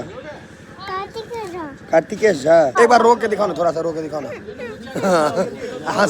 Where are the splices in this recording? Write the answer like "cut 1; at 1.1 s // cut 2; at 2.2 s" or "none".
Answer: cut 1; at 2.7 s